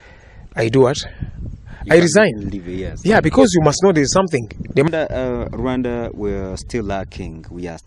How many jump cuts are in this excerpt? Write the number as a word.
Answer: one